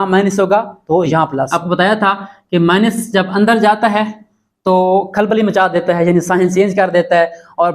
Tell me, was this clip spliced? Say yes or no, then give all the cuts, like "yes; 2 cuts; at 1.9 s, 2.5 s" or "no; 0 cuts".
yes; 1 cut; at 1.5 s